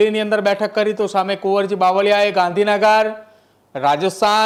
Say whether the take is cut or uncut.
uncut